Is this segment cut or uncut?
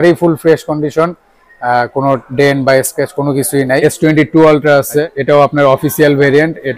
cut